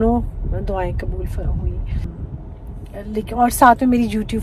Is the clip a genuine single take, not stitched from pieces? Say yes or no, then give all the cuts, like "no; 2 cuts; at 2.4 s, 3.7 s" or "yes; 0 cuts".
no; 1 cut; at 2.1 s